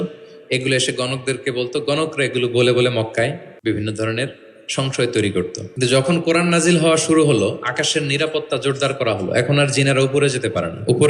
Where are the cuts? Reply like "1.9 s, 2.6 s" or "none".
3.5 s, 5.6 s